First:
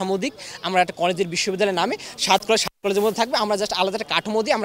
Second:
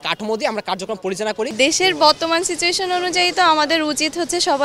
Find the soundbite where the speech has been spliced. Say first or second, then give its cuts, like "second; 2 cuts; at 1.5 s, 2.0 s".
second; 1 cut; at 1.5 s